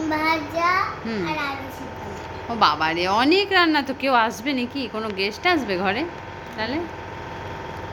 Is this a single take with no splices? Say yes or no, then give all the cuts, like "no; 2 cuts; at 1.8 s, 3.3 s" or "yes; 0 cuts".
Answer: yes; 0 cuts